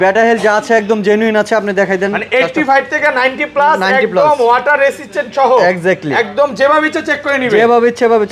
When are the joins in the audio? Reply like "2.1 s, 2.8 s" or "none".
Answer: none